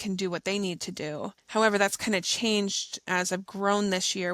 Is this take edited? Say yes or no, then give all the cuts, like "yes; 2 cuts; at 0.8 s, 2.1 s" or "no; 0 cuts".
yes; 2 cuts; at 1.4 s, 2.9 s